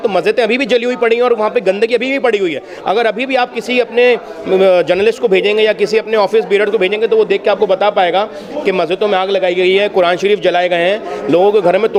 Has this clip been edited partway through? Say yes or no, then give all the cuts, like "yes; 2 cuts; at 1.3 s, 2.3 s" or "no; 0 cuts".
no; 0 cuts